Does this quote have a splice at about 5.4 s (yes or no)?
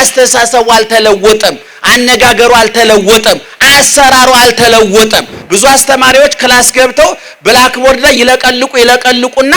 yes